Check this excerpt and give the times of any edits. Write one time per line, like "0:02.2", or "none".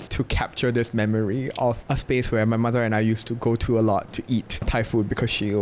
none